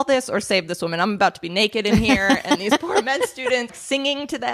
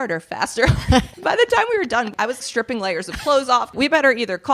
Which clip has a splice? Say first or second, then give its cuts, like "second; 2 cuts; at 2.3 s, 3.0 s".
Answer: second; 3 cuts; at 1.1 s, 2.4 s, 3.7 s